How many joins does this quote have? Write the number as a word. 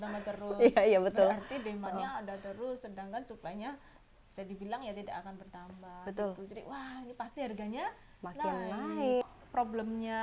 one